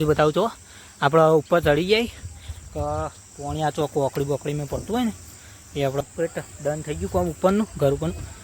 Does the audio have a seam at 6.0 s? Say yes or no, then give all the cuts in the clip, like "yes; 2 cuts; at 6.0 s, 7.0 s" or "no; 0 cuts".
yes; 1 cut; at 6.0 s